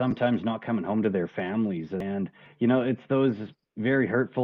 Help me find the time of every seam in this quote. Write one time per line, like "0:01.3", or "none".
0:02.2